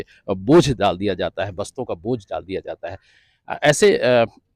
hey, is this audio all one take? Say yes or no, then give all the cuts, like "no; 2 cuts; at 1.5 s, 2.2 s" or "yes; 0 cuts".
yes; 0 cuts